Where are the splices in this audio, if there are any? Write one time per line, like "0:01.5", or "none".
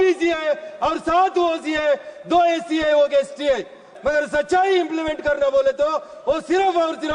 0:03.8